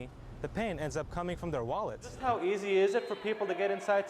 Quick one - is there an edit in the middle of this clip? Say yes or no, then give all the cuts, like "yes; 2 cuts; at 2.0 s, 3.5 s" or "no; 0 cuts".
yes; 1 cut; at 2.2 s